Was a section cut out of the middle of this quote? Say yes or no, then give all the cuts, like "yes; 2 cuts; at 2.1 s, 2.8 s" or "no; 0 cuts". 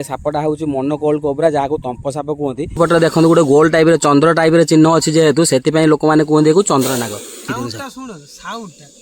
yes; 2 cuts; at 2.8 s, 7.5 s